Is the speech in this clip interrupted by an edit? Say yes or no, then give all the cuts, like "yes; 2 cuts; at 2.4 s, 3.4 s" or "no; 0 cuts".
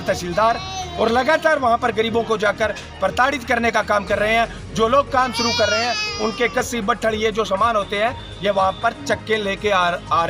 no; 0 cuts